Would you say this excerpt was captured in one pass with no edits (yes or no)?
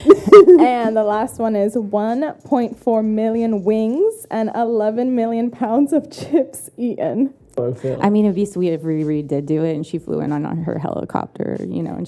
no